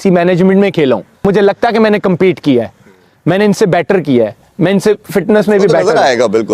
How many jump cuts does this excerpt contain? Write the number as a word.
one